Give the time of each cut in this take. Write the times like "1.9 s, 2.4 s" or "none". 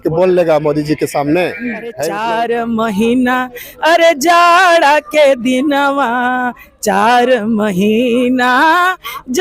2.1 s